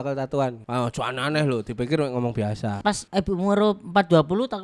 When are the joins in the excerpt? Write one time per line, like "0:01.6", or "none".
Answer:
0:02.8